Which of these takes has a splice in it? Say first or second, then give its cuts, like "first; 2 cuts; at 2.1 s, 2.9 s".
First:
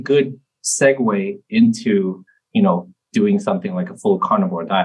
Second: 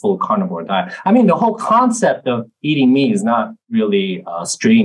second; 1 cut; at 3.6 s